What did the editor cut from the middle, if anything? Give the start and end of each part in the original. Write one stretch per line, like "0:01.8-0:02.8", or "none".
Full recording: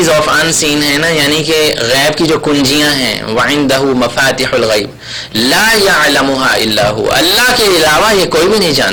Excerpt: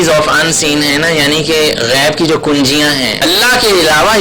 0:03.2-0:07.2

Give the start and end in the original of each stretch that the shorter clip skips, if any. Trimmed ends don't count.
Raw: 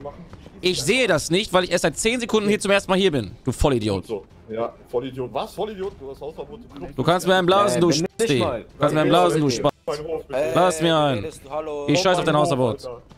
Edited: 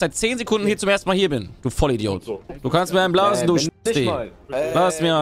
0:04.2-0:06.8
0:08.7-0:10.1

